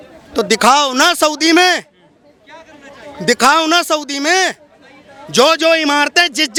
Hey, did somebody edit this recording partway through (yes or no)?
no